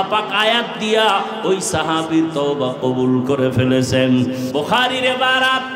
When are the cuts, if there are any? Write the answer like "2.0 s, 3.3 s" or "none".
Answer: 4.5 s